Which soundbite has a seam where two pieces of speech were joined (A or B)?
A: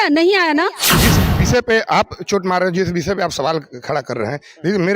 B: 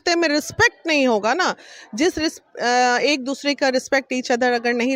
A